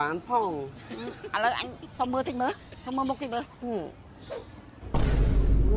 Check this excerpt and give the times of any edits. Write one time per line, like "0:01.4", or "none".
none